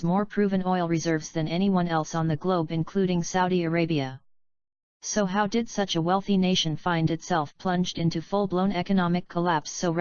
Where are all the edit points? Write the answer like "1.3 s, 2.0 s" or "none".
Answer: 4.6 s

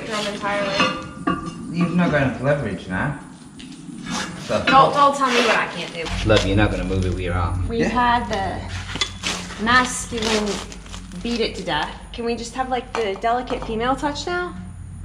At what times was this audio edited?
6.0 s, 7.6 s

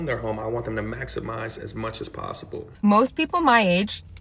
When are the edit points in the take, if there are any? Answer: 2.7 s

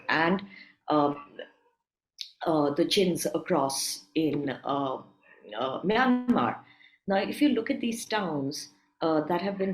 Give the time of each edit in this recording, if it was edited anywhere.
none

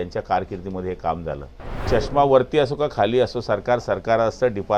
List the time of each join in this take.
1.9 s

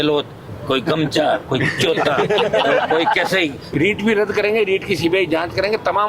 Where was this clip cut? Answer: 3.6 s

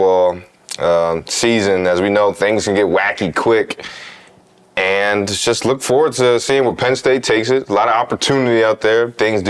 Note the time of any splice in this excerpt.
none

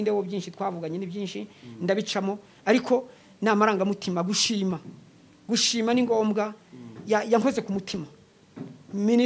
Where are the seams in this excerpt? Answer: none

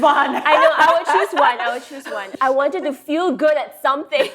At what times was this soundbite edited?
2.3 s

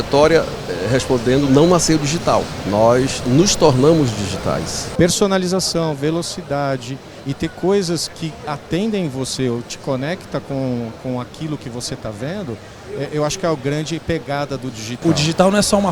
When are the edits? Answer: 2.6 s, 4.8 s, 15.0 s

